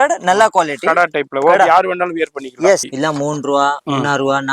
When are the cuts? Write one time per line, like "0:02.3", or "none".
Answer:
0:02.9